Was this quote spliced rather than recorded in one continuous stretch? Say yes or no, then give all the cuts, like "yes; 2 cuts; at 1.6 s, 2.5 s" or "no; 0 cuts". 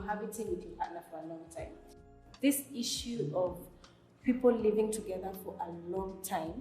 yes; 1 cut; at 2.0 s